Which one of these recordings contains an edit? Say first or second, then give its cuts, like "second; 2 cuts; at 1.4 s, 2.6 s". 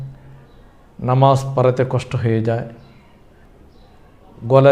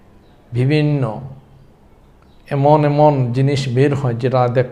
first; 1 cut; at 3.4 s